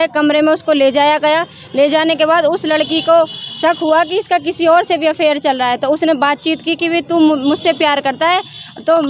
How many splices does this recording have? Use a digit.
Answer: 0